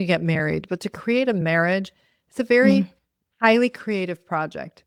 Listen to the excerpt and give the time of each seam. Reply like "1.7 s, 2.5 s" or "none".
none